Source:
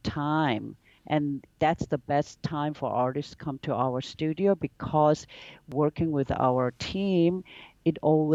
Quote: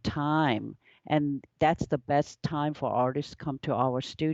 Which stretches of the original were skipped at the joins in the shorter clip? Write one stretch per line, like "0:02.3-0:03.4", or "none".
none